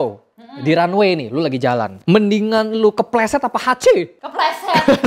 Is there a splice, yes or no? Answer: no